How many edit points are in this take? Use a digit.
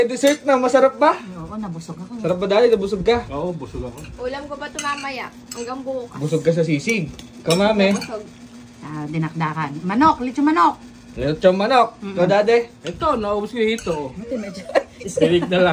0